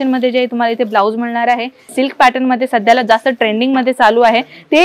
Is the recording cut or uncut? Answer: cut